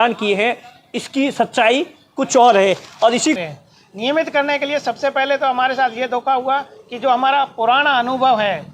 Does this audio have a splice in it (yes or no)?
yes